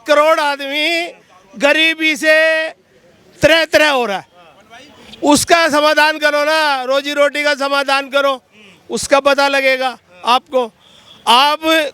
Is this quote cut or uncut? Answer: uncut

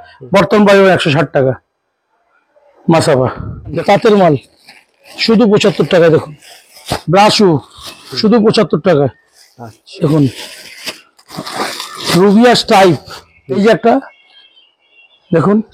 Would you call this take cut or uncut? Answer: cut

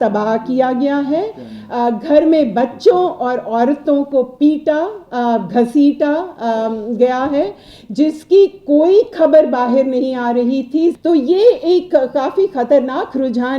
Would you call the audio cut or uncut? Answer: cut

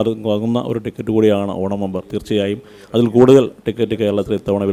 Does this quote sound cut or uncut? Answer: uncut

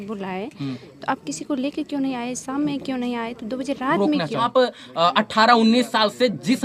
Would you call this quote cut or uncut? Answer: cut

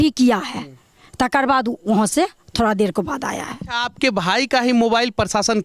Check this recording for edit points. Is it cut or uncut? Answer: cut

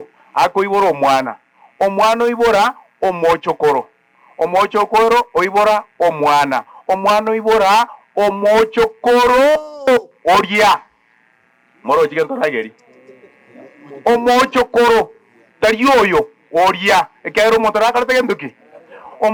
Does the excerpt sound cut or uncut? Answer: uncut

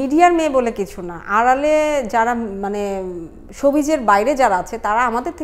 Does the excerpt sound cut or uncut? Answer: uncut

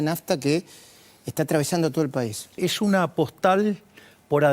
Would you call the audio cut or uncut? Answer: cut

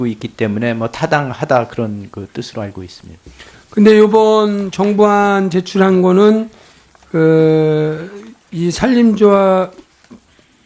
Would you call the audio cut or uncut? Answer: cut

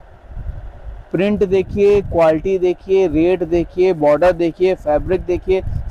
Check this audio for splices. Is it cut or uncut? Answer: uncut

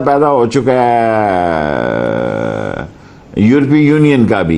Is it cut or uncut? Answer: uncut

